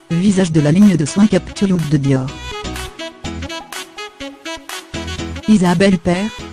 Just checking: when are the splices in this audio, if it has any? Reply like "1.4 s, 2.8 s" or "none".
2.4 s, 5.4 s